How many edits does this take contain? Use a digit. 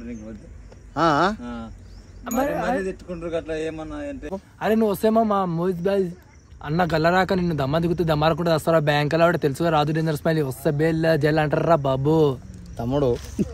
1